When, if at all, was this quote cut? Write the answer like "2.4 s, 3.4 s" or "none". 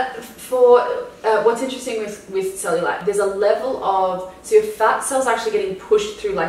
3.0 s